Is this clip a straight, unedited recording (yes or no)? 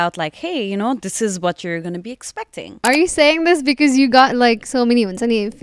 no